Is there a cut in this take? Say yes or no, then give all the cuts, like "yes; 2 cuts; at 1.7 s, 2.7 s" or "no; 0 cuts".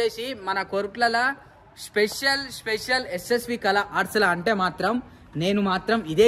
no; 0 cuts